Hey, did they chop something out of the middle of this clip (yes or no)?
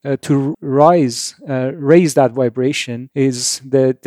yes